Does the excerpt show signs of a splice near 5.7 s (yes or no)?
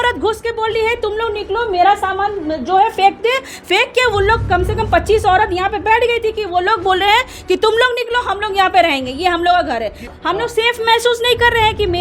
no